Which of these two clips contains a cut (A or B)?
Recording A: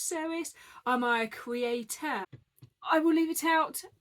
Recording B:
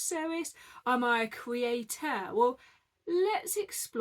A